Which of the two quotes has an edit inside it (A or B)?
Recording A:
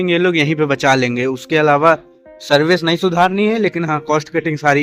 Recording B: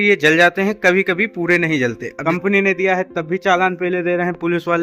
B